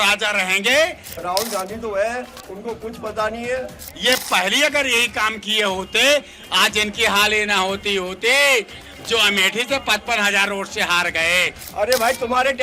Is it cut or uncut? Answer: cut